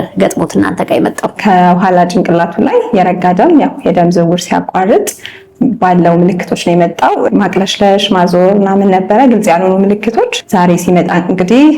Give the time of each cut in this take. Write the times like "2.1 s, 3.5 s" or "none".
1.4 s, 7.3 s, 10.4 s